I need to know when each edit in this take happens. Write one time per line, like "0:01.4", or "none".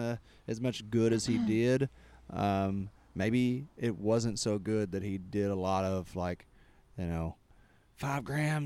none